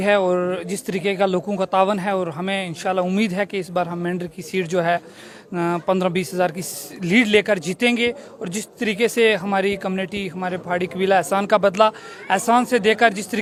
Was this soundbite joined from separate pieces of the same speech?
no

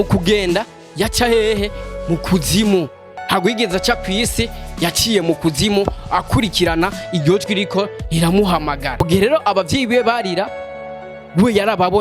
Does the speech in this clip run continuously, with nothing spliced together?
no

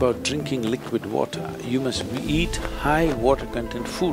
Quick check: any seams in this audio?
no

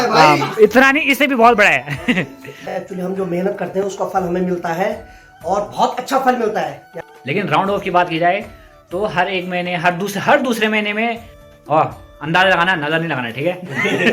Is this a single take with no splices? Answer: no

